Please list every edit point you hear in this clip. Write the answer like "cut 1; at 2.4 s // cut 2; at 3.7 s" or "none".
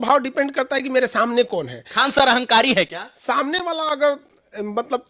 none